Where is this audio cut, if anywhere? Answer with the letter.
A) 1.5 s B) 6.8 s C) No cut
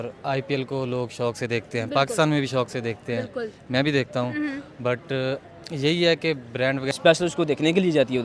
B